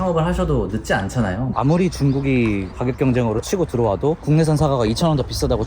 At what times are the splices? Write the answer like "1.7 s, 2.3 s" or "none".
1.5 s, 4.2 s